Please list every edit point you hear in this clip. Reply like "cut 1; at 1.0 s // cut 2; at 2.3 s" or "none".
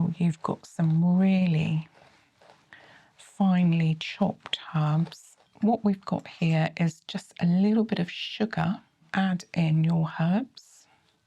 cut 1; at 5.4 s // cut 2; at 9.1 s